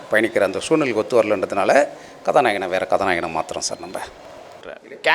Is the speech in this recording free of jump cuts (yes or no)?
yes